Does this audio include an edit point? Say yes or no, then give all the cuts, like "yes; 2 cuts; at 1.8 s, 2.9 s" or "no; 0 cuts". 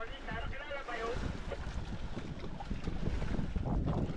no; 0 cuts